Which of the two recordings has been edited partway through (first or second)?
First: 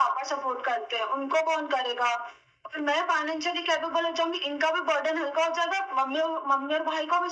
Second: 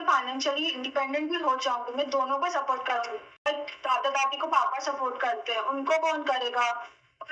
second